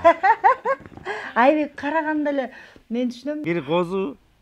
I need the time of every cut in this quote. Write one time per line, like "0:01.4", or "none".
0:03.4